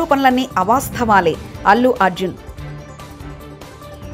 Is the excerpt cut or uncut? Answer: uncut